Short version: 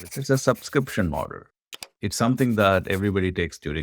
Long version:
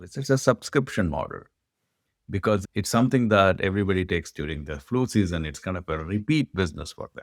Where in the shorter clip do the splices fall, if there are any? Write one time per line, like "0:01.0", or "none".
0:01.9